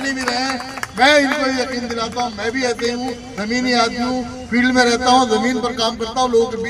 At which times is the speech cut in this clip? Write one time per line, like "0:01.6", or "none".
none